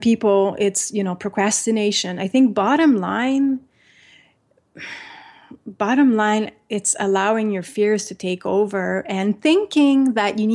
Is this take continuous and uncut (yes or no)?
yes